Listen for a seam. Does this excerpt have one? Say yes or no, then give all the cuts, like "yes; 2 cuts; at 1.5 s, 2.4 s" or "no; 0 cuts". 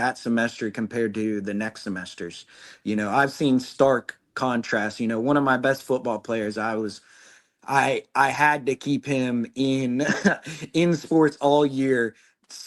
no; 0 cuts